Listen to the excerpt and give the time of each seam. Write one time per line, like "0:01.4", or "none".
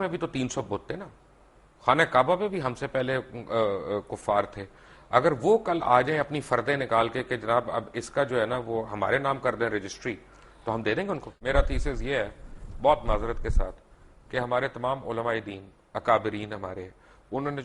0:11.3